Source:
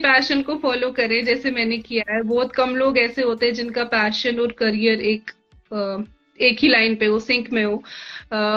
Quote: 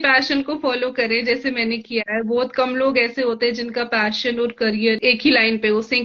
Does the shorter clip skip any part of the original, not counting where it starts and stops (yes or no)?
yes